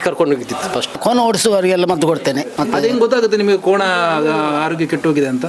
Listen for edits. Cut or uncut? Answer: cut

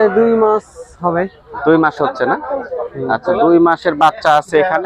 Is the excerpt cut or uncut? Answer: uncut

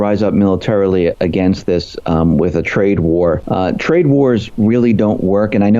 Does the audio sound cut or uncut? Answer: cut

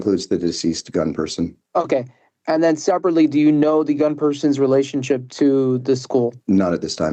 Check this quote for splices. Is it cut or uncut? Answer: cut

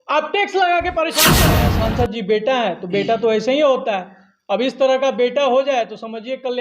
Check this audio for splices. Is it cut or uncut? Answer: cut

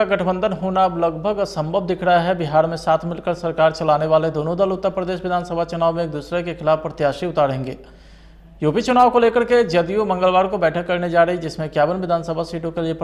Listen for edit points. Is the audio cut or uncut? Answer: uncut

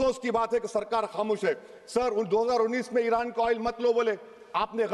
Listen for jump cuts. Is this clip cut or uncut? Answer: uncut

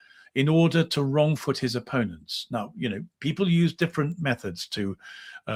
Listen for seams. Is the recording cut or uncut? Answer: uncut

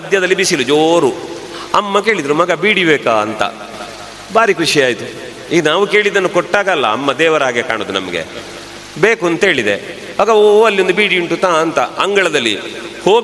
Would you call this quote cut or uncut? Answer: uncut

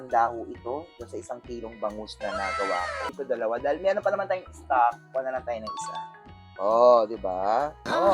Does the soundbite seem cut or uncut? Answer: cut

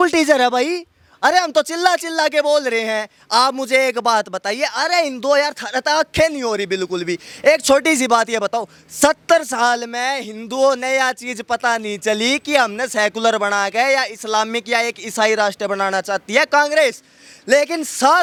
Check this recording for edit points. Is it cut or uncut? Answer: uncut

